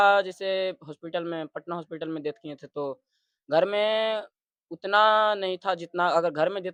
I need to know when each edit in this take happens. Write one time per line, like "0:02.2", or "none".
none